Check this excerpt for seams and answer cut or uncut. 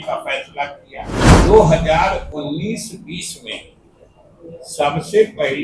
cut